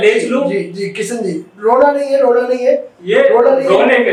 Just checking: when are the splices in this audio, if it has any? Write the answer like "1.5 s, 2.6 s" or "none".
none